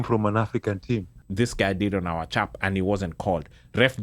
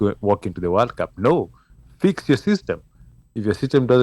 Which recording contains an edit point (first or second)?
first